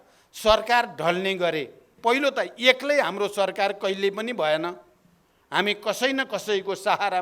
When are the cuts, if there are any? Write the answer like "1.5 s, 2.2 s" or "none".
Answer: 1.9 s